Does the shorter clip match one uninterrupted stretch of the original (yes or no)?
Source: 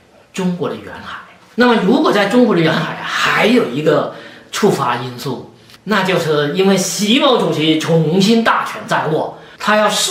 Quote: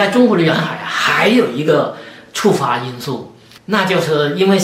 yes